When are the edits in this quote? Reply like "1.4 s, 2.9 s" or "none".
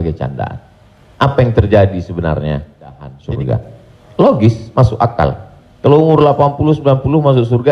3.1 s